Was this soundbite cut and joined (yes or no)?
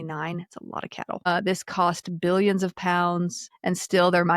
yes